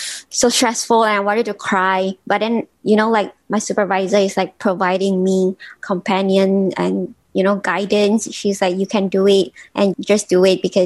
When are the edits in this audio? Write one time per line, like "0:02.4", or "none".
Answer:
0:02.7
0:05.7
0:09.9